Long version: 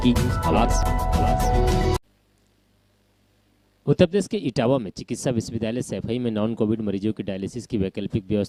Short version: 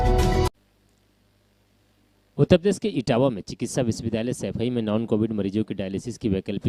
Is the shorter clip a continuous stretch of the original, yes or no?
yes